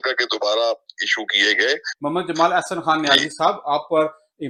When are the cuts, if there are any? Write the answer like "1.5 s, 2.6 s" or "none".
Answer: none